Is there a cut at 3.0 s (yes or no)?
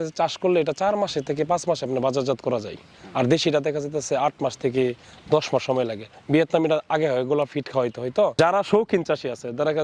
no